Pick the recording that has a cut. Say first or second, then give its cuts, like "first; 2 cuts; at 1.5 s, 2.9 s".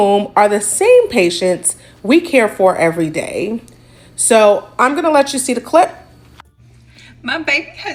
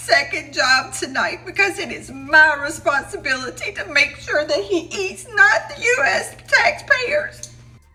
first; 1 cut; at 6.7 s